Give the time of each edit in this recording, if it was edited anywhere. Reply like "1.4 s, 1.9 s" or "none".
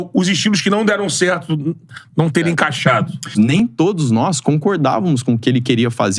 3.3 s